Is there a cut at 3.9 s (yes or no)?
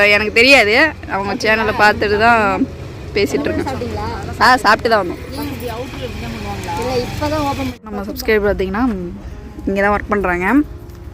no